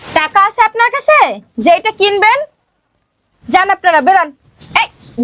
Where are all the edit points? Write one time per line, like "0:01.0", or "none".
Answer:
none